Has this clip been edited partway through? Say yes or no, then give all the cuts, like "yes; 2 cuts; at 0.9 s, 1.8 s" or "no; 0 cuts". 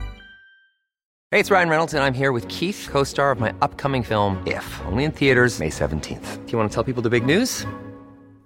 yes; 1 cut; at 1.2 s